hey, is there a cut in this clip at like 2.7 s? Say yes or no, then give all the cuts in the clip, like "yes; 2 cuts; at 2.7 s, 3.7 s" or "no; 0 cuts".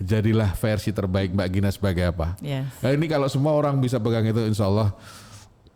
no; 0 cuts